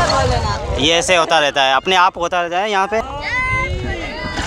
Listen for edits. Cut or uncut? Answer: cut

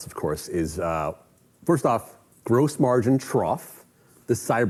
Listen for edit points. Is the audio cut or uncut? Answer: uncut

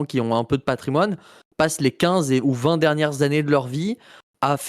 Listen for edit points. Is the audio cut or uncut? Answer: uncut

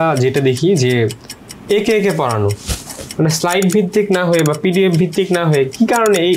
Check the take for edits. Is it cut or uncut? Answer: uncut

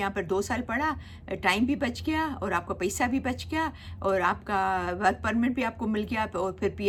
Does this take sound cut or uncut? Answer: uncut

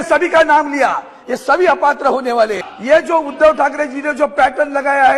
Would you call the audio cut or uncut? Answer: cut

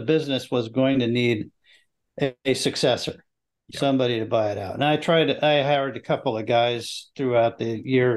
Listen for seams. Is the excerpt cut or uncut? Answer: uncut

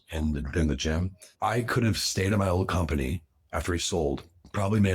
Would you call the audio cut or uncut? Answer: cut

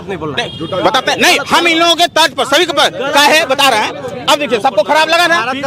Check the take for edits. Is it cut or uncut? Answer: uncut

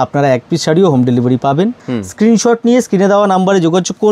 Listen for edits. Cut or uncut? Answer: cut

